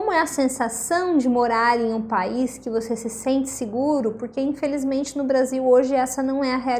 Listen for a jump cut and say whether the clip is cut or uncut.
uncut